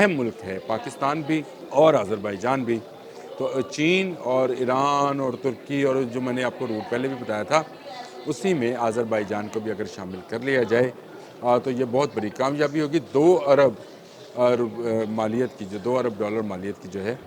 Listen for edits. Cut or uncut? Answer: cut